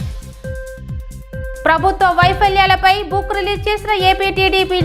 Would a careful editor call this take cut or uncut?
cut